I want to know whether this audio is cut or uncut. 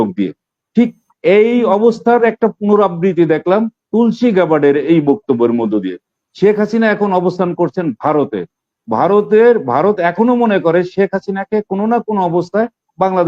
uncut